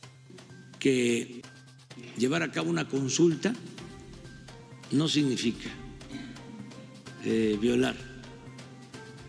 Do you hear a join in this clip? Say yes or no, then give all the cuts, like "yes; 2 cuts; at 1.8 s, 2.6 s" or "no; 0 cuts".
no; 0 cuts